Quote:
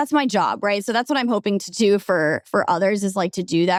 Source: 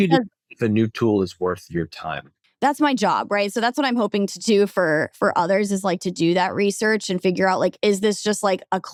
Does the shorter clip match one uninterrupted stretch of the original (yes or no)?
yes